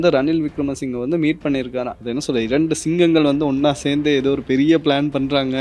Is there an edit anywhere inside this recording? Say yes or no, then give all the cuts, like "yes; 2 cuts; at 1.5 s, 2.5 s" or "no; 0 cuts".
yes; 1 cut; at 1.9 s